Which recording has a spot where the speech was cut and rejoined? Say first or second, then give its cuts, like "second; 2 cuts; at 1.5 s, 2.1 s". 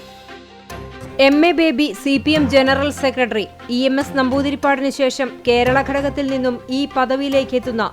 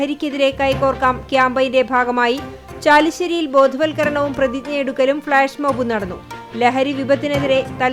first; 1 cut; at 1.1 s